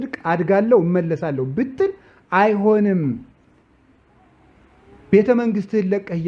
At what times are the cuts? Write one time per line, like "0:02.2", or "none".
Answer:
none